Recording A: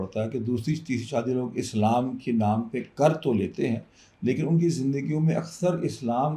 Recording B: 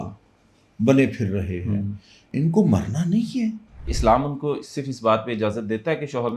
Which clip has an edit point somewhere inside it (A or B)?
B